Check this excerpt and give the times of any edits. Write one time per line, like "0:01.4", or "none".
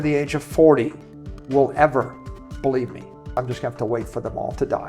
0:03.3